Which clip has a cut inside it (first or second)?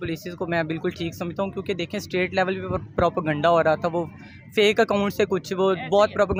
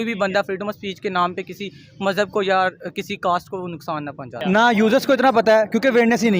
second